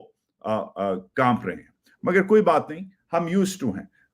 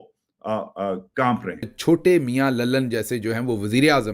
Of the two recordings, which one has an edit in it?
second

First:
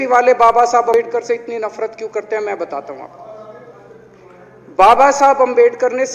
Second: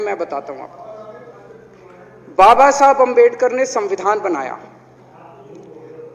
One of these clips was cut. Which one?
first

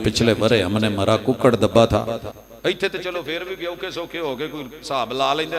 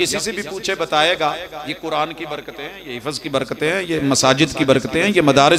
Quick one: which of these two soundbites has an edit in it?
first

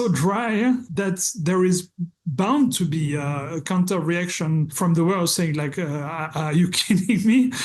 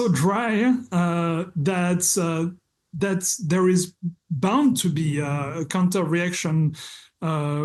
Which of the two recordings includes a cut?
first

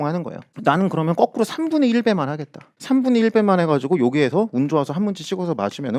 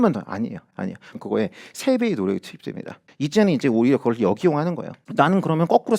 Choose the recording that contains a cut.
second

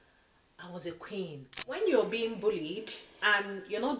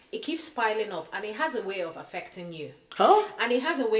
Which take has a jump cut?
first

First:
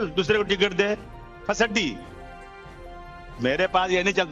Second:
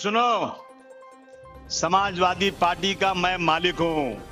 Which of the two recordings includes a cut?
first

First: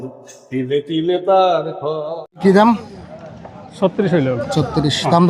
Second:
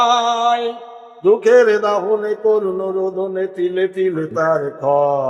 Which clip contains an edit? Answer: first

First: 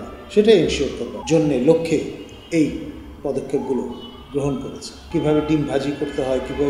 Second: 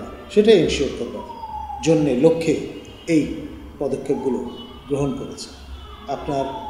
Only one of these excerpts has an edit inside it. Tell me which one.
first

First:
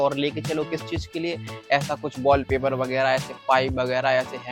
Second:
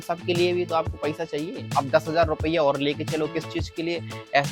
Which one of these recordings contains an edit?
second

